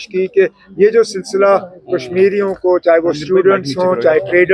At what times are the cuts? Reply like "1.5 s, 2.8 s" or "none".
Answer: none

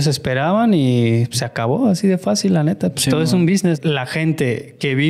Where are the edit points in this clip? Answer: 3.8 s

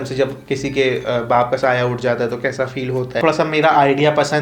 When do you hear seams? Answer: 3.2 s

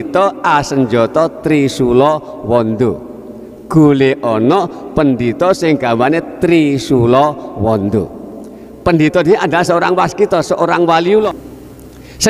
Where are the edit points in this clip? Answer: 11.4 s

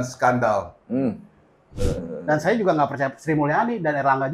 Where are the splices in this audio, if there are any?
1.7 s

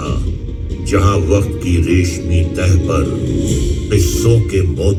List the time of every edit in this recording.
none

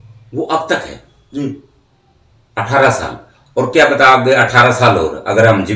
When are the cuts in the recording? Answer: none

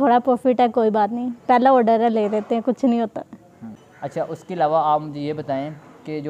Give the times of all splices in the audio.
none

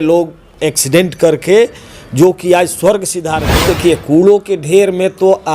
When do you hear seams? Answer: 3.5 s

